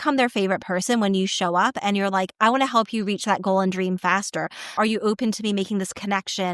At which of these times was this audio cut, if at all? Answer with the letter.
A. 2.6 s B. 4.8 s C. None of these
B